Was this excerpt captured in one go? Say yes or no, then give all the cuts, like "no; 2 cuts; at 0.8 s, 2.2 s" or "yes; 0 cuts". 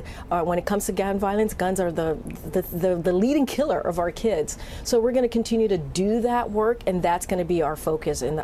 yes; 0 cuts